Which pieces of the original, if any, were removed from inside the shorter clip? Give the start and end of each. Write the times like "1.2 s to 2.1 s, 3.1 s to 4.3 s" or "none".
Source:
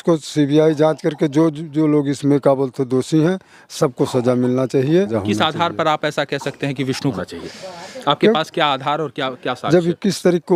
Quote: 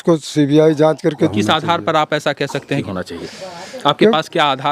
1.3 s to 5.2 s, 6.8 s to 7.1 s